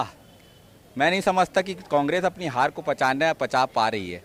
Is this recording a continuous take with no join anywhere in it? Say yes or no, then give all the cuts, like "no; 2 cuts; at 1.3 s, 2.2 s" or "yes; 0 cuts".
yes; 0 cuts